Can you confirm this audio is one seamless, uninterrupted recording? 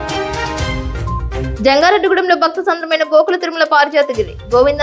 no; 1 cut; at 1.5 s

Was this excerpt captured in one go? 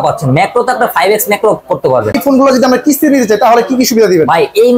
no; 1 cut; at 2.2 s

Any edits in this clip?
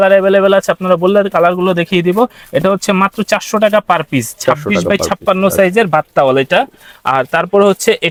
no; 0 cuts

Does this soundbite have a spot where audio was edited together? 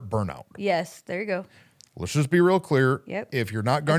no; 0 cuts

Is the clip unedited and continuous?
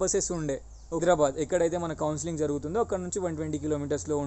no; 1 cut; at 1.0 s

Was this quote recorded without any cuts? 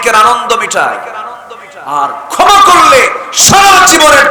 yes; 0 cuts

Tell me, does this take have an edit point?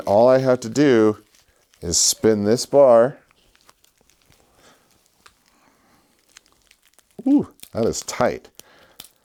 no; 0 cuts

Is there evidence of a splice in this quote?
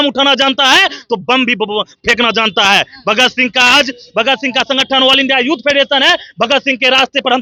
no; 0 cuts

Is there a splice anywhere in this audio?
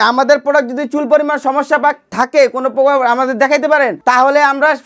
yes; 1 cut; at 4.0 s

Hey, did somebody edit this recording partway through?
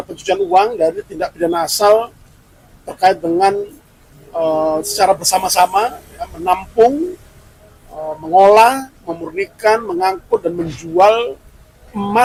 no; 0 cuts

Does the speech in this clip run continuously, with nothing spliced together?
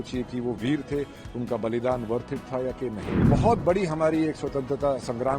no; 1 cut; at 3.1 s

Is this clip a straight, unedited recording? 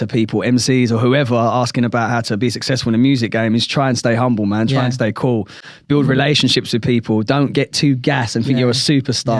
yes; 0 cuts

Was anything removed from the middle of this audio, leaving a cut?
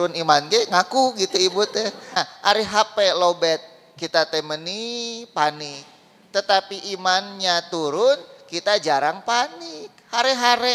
yes; 1 cut; at 2.2 s

